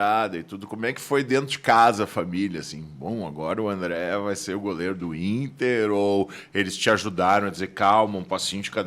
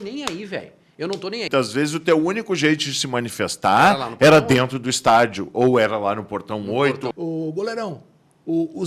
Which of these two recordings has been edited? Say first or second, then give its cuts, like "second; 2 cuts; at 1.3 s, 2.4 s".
second; 2 cuts; at 1.5 s, 7.1 s